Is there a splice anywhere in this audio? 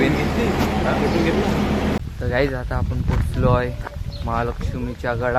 yes; 1 cut; at 2.0 s

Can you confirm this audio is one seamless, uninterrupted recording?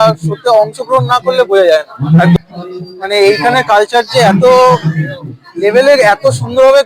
no; 1 cut; at 2.4 s

